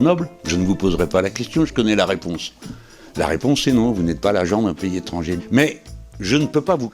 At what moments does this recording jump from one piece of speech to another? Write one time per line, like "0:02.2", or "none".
0:05.3